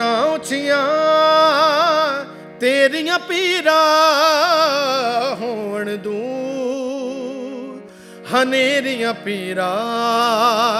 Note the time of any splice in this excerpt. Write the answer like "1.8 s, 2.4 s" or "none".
none